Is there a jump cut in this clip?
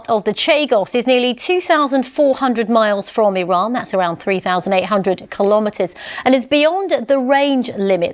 no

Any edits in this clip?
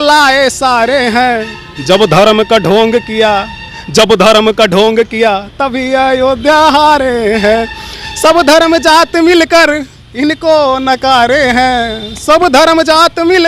no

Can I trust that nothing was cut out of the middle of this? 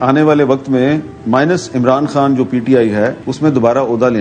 no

